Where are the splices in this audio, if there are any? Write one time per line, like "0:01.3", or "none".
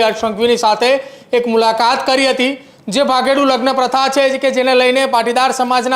none